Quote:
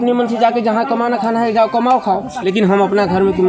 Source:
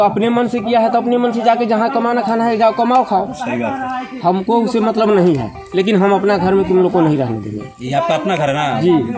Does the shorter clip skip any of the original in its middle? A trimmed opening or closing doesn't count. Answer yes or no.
yes